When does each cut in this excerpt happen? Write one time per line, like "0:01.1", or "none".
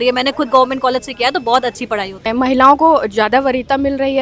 0:02.2